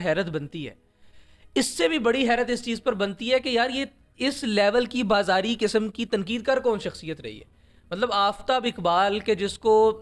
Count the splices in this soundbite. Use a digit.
0